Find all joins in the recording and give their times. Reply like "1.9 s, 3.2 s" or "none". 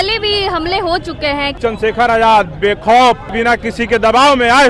1.5 s, 3.3 s